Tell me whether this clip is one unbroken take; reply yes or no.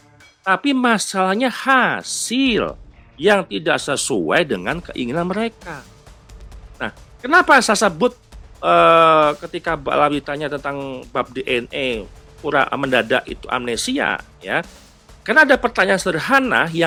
yes